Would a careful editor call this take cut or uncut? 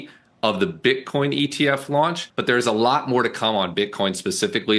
cut